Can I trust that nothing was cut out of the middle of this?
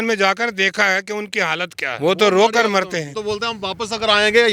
no; 2 cuts; at 1.8 s, 3.1 s

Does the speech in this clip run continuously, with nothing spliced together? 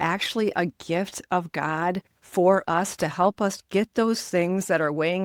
yes; 0 cuts

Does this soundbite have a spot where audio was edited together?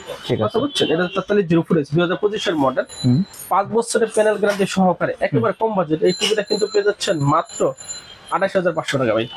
yes; 1 cut; at 3.4 s

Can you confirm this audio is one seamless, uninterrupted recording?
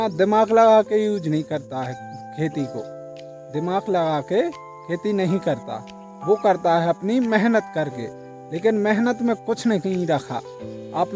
yes; 0 cuts

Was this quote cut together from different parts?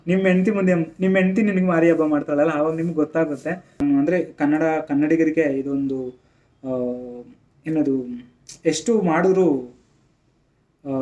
yes; 1 cut; at 3.8 s

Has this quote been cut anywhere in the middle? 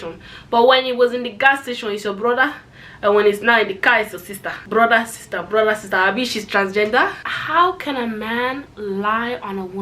yes; 1 cut; at 7.3 s

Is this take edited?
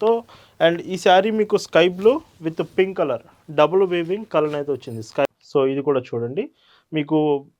yes; 1 cut; at 5.2 s

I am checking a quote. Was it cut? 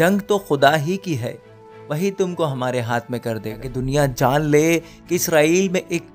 yes; 1 cut; at 3.6 s

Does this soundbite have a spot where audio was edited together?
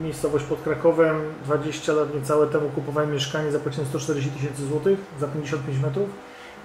yes; 1 cut; at 1.4 s

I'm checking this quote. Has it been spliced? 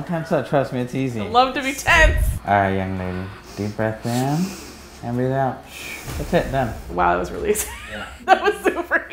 no; 0 cuts

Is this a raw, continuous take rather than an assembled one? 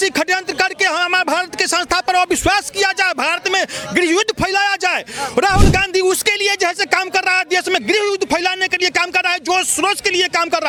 yes; 0 cuts

